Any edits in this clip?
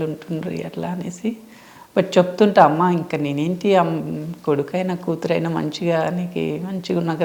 no; 0 cuts

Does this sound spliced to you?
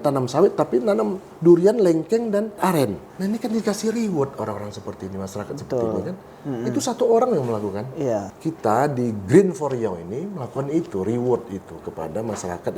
yes; 2 cuts; at 2.8 s, 8.3 s

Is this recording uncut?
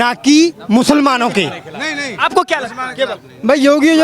yes; 0 cuts

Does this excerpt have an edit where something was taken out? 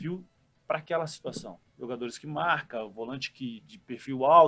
no; 0 cuts

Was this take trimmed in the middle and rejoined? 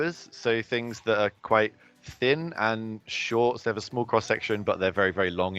no; 0 cuts

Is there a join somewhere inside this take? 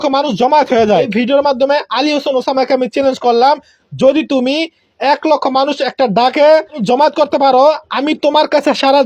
yes; 2 cuts; at 1.1 s, 6.8 s

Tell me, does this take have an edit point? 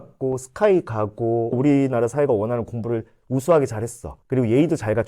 yes; 1 cut; at 1.5 s

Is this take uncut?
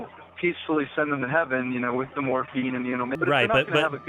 no; 1 cut; at 3.1 s

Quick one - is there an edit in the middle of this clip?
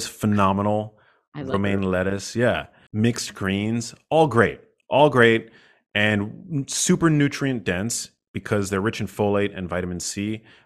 no; 0 cuts

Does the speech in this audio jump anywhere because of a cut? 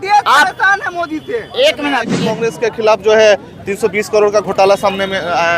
yes; 1 cut; at 2.2 s

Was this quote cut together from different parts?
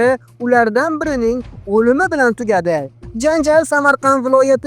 no; 0 cuts

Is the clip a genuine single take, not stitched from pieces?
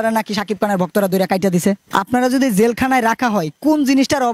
no; 1 cut; at 1.8 s

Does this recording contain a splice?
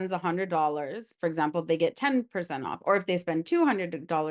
no; 0 cuts

